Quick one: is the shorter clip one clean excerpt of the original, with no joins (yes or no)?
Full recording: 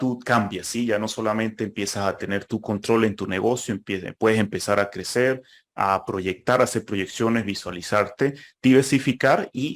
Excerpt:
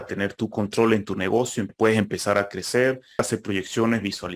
no